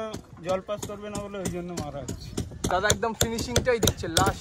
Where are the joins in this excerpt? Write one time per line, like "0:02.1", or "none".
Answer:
0:02.7